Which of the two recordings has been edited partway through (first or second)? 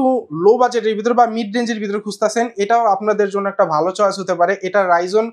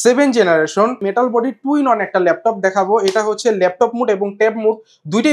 second